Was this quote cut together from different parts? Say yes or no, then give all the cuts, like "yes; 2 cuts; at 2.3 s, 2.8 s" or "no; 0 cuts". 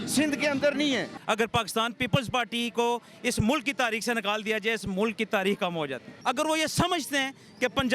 yes; 2 cuts; at 1.1 s, 6.1 s